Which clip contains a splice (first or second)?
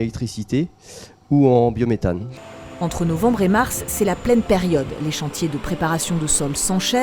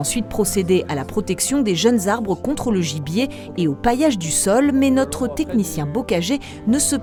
first